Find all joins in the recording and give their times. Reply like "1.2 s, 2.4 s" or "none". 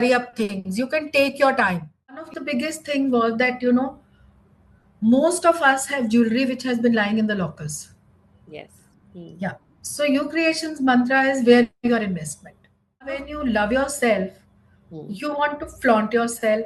2.3 s, 13.3 s